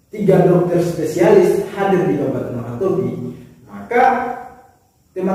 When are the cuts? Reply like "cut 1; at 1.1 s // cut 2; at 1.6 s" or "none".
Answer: none

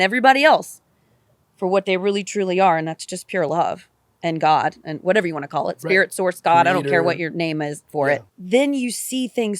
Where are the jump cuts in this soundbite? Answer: cut 1; at 8.3 s

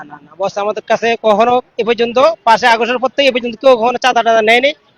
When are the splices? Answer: none

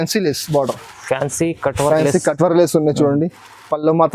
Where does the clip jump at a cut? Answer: none

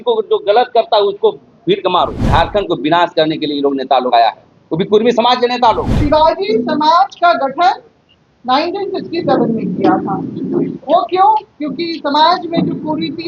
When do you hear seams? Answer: cut 1; at 2.2 s // cut 2; at 5.9 s

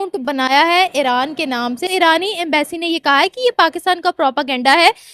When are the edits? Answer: cut 1; at 1.9 s

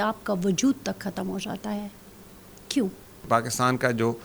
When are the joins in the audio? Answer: cut 1; at 3.3 s

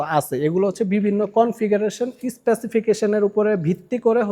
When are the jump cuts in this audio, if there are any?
none

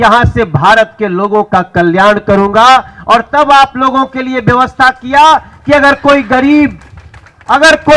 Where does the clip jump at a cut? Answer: none

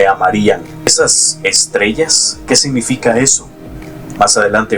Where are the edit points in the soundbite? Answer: cut 1; at 0.9 s

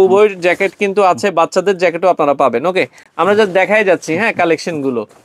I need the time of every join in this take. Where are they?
none

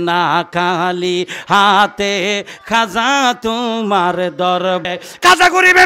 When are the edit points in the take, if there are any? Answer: cut 1; at 4.8 s

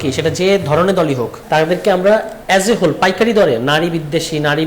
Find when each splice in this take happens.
cut 1; at 1.3 s // cut 2; at 2.3 s

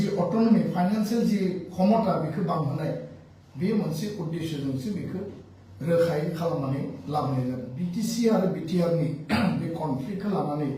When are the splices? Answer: cut 1; at 7.9 s

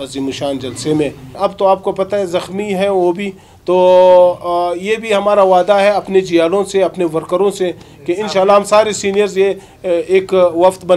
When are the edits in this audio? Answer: cut 1; at 1.4 s

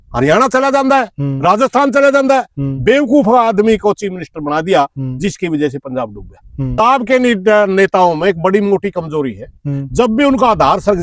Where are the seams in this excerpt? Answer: cut 1; at 6.8 s

